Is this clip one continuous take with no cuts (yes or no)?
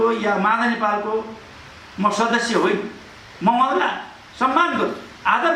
yes